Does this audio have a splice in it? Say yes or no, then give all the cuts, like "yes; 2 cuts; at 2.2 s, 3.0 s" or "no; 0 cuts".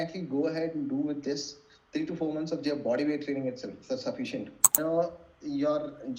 yes; 1 cut; at 4.8 s